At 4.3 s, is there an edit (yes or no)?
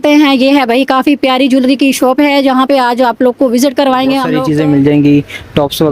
yes